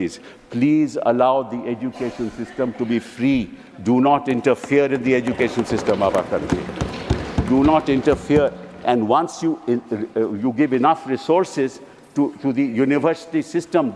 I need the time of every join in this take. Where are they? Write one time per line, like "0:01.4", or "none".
none